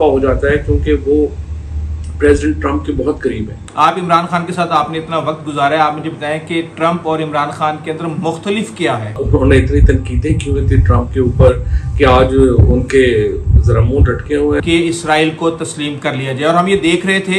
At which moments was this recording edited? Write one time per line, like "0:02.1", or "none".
0:03.6
0:09.2
0:14.6